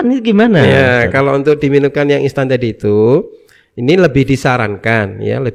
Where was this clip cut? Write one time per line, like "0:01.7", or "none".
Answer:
none